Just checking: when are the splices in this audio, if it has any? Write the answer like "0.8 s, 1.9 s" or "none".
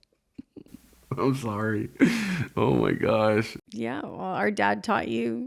3.6 s